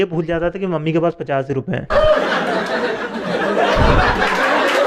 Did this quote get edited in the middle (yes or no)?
no